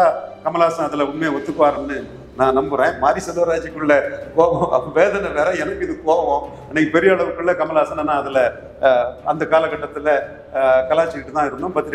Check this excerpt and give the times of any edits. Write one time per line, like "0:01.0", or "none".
none